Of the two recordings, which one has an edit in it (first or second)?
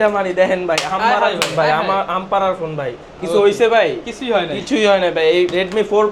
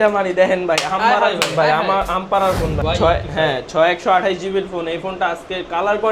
second